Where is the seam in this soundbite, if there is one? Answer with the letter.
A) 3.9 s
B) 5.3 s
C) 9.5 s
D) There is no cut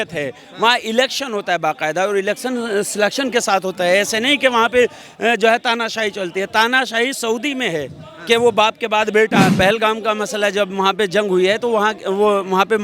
C